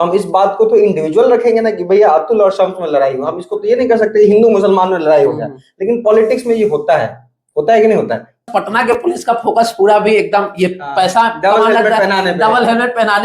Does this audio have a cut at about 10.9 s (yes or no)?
no